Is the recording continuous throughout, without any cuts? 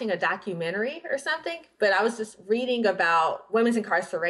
no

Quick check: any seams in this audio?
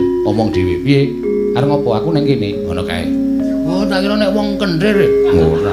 no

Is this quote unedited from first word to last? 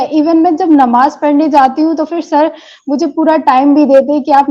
yes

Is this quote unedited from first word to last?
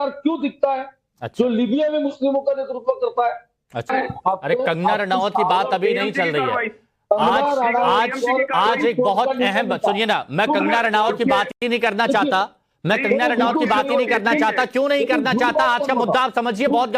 no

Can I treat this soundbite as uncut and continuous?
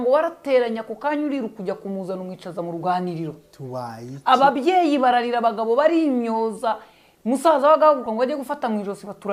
yes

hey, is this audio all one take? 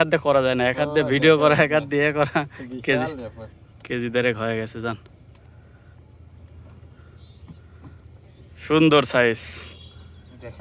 yes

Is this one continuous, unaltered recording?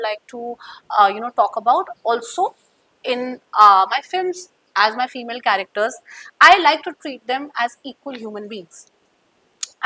yes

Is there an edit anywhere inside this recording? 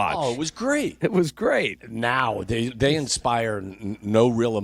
yes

